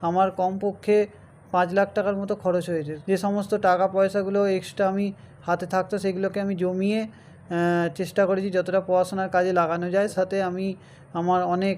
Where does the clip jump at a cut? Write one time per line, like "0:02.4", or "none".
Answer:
0:02.9
0:10.1